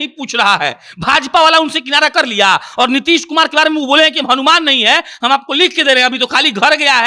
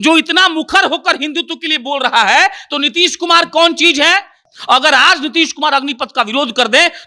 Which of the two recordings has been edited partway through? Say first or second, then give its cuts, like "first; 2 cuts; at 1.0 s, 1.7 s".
second; 1 cut; at 4.4 s